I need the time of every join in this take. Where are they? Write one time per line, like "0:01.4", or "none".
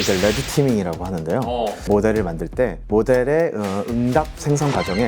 0:01.8
0:02.8